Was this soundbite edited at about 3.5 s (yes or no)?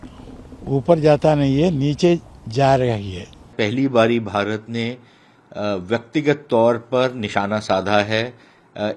yes